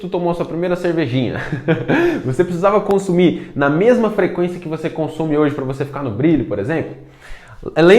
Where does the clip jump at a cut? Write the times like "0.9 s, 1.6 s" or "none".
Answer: none

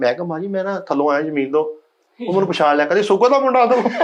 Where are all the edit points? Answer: none

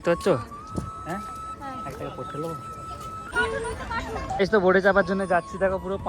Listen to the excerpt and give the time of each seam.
3.3 s

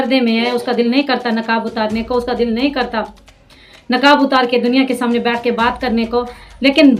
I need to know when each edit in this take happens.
none

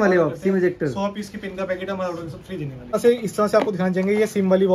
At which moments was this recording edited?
2.9 s

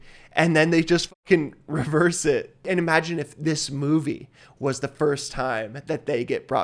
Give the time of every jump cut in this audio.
2.6 s

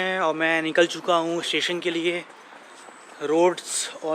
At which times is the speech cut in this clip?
none

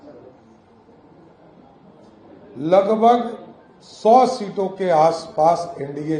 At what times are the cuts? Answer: none

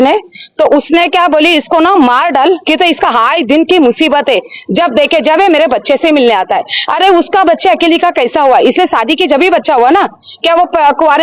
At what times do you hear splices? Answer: none

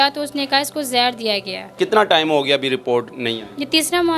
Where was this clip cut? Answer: 1.7 s

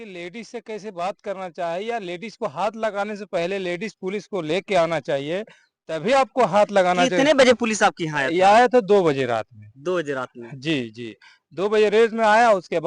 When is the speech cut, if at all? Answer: none

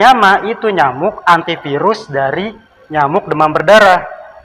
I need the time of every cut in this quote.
none

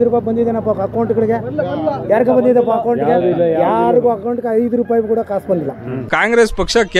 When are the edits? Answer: 6.1 s

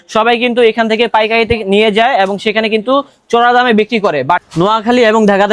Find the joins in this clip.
4.4 s

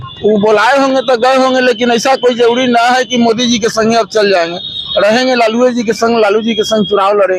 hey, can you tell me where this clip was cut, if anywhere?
none

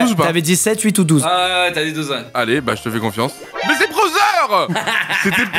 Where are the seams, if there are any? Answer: 3.4 s, 4.8 s

